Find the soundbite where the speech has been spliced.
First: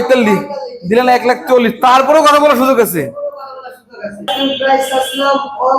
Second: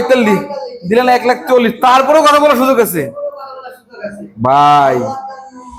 first; 1 cut; at 4.3 s

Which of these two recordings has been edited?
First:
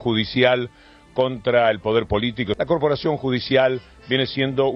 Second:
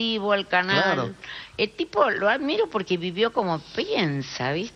first; 1 cut; at 2.5 s

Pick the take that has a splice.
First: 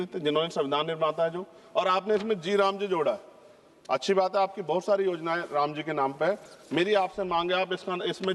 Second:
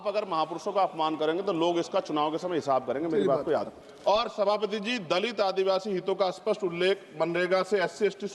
second; 1 cut; at 3.7 s

